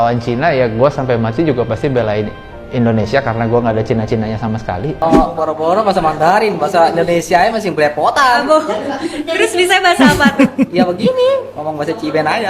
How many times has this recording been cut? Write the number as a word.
one